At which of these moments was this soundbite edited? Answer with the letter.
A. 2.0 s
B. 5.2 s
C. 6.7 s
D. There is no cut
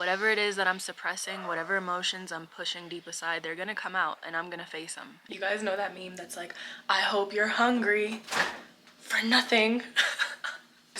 D